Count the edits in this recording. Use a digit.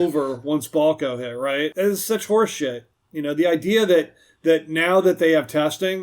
1